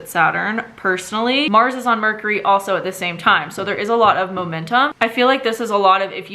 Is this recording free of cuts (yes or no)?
no